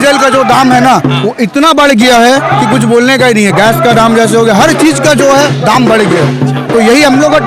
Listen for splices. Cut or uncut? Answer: uncut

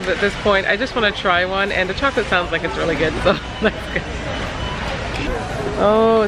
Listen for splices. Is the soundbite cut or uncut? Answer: uncut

